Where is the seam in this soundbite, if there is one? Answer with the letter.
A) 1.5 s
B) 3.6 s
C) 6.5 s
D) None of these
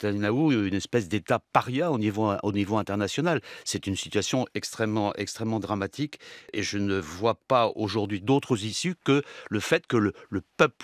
C